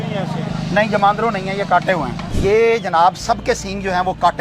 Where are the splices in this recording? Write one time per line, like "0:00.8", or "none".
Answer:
0:02.2